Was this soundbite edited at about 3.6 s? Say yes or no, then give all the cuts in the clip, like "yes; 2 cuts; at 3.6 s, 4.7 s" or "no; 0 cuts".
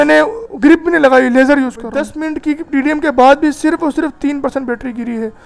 no; 1 cut; at 2.1 s